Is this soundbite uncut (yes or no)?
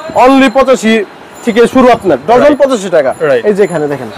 yes